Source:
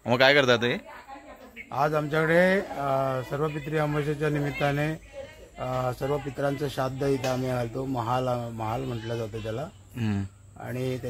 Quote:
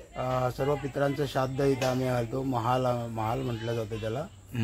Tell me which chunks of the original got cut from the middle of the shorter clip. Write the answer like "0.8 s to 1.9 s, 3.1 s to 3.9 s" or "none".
none